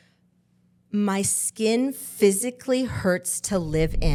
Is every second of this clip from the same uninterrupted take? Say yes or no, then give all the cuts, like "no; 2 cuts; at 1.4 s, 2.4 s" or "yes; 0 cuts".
yes; 0 cuts